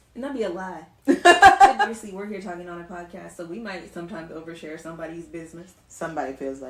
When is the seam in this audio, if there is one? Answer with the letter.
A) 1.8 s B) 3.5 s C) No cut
A